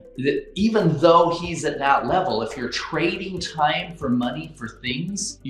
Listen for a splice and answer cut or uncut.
uncut